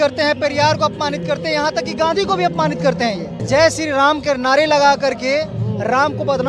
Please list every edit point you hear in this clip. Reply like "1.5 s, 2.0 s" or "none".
3.4 s